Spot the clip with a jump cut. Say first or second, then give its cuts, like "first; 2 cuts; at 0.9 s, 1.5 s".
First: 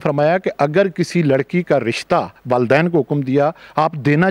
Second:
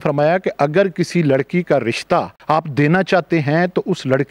second; 1 cut; at 2.4 s